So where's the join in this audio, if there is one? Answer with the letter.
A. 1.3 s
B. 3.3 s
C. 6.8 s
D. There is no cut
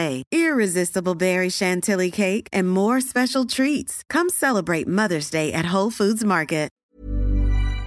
C